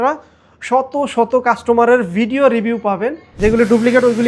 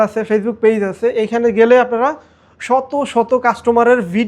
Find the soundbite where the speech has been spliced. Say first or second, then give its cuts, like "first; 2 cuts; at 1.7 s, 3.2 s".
first; 1 cut; at 3.2 s